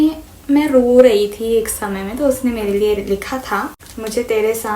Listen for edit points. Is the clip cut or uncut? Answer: cut